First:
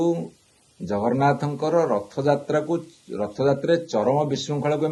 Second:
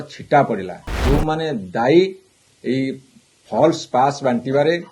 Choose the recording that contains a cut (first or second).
second